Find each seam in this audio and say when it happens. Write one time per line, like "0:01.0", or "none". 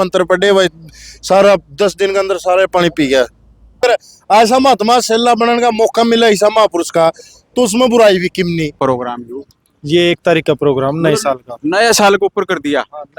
0:03.8
0:08.8